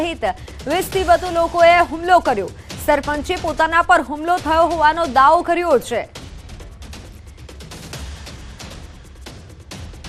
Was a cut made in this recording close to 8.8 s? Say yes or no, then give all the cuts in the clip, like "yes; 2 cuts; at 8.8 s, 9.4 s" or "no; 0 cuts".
no; 0 cuts